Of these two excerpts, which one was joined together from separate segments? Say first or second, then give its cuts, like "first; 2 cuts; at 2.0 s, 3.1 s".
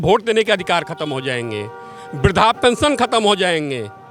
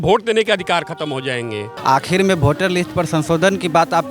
second; 1 cut; at 1.7 s